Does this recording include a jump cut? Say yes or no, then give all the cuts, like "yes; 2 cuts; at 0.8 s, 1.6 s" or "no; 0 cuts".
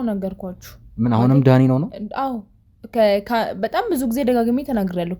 no; 0 cuts